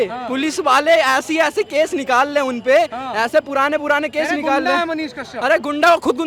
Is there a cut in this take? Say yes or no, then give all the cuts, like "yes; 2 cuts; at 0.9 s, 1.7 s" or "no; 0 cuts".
no; 0 cuts